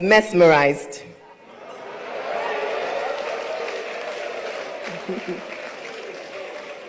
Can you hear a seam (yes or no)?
no